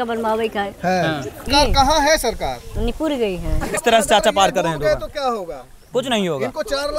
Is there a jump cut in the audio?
yes; 2 cuts; at 1.3 s, 3.8 s

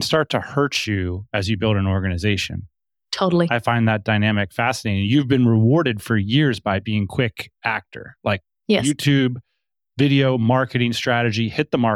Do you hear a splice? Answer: no; 0 cuts

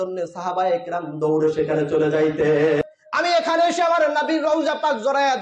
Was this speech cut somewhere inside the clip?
yes; 1 cut; at 2.8 s

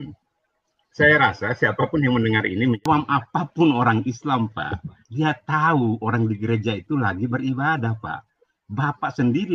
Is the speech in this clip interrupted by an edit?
yes; 1 cut; at 2.8 s

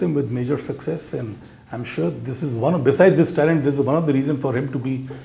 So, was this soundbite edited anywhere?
no; 0 cuts

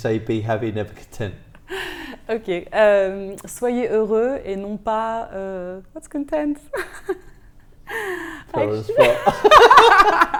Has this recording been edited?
no; 0 cuts

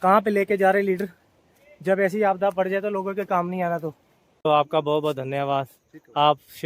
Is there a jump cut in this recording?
yes; 1 cut; at 4.5 s

